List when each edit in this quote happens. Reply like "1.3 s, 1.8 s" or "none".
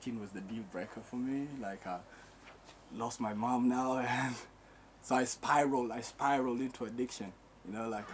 none